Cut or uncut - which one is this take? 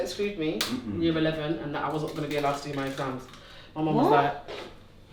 uncut